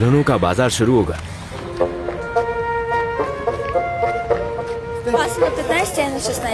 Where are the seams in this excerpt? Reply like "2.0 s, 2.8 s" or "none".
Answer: none